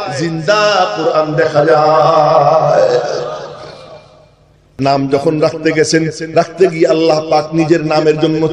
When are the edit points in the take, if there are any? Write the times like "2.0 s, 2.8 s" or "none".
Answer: 4.7 s